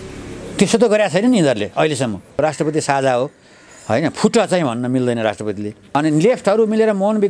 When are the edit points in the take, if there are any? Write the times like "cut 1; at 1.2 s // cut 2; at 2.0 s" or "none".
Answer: cut 1; at 2.4 s // cut 2; at 5.7 s